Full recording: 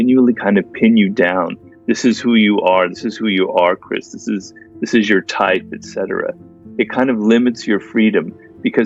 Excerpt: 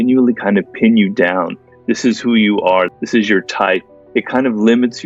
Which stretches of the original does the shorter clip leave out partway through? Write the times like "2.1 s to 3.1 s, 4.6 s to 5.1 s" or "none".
3.0 s to 4.8 s, 5.8 s to 6.6 s